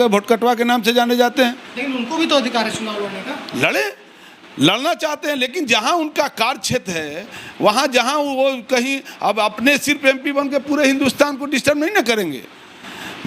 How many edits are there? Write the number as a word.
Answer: zero